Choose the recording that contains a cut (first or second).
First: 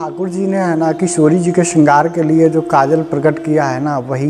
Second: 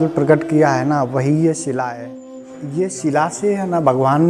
second